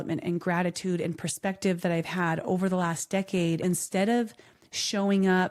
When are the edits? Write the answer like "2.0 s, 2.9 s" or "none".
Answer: 3.6 s